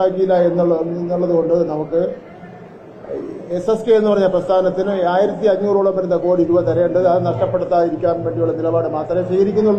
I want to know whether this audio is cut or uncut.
uncut